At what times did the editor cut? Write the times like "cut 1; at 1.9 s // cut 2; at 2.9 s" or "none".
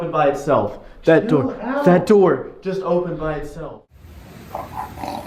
cut 1; at 3.6 s

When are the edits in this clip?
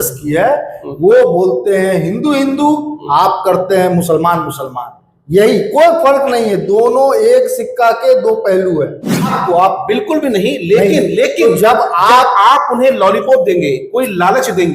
cut 1; at 9.4 s

